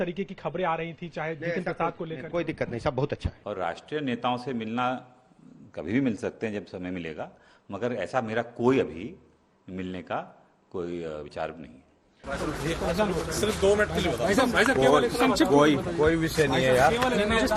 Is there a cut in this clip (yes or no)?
yes